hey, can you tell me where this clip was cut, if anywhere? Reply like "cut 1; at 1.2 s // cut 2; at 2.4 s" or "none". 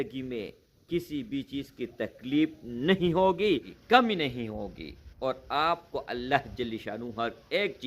cut 1; at 3.7 s